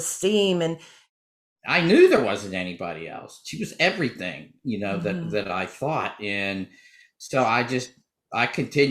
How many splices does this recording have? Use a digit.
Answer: 1